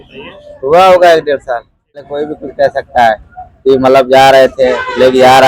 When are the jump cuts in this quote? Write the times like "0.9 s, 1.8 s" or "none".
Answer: 2.3 s